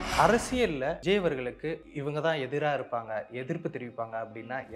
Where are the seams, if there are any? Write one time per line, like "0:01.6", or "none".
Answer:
0:01.0
0:01.9